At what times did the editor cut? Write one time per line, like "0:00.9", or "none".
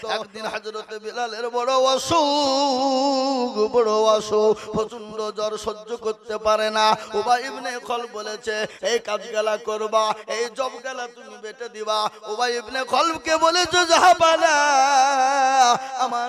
none